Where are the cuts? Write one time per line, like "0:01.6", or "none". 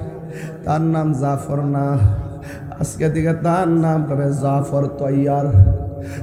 none